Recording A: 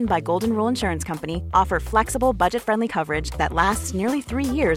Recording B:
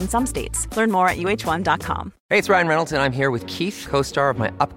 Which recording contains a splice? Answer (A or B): B